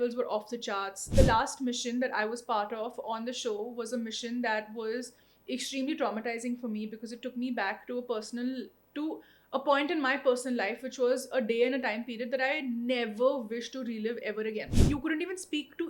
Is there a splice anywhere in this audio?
yes; 2 cuts; at 1.1 s, 14.7 s

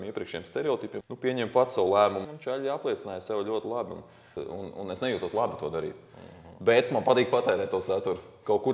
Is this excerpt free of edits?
no; 3 cuts; at 1.0 s, 2.3 s, 4.4 s

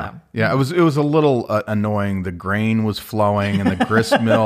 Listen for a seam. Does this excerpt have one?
no; 0 cuts

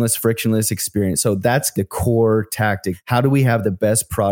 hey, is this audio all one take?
no; 2 cuts; at 1.7 s, 2.9 s

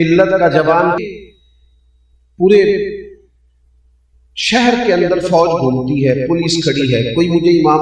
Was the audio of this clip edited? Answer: yes; 1 cut; at 1.0 s

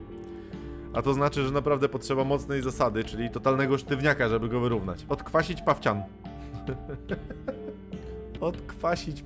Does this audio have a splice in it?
yes; 2 cuts; at 5.0 s, 8.3 s

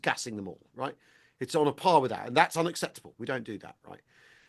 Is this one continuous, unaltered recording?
yes; 0 cuts

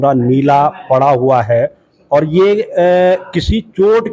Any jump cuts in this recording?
no; 0 cuts

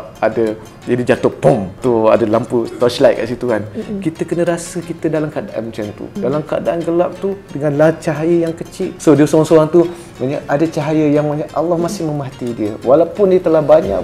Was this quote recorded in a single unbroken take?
no; 3 cuts; at 1.7 s, 6.2 s, 8.9 s

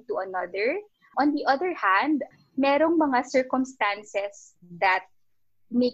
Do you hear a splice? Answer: yes; 2 cuts; at 1.1 s, 2.3 s

